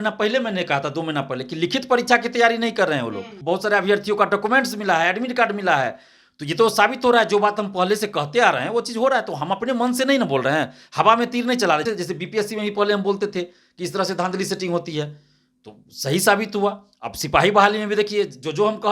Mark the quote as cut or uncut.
cut